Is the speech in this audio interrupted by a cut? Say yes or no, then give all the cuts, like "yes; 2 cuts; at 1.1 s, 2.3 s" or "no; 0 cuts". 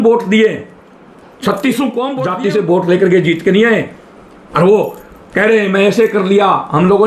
yes; 1 cut; at 2.2 s